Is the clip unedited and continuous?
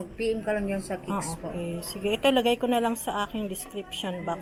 yes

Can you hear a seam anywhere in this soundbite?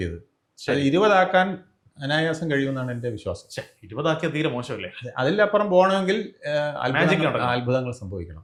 no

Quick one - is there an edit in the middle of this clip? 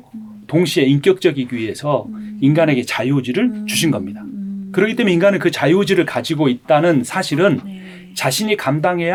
no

